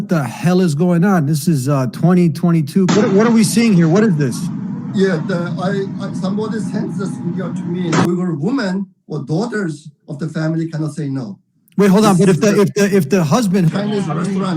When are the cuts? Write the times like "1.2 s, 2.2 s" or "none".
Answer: 2.9 s, 8.1 s, 13.7 s